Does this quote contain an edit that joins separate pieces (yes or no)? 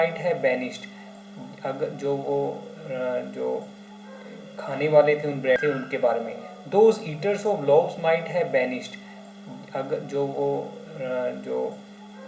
yes